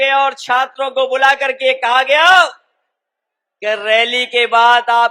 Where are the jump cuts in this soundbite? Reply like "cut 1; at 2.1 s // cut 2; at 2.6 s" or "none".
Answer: none